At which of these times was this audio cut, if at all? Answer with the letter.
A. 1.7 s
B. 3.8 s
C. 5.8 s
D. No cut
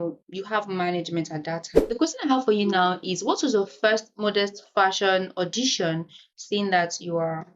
A